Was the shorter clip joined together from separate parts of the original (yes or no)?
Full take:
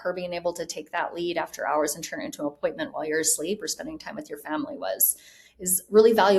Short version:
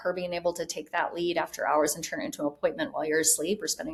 no